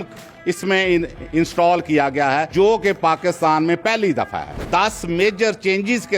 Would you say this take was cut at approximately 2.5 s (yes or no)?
yes